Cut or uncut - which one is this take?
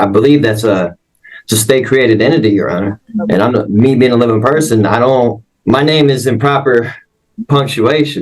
cut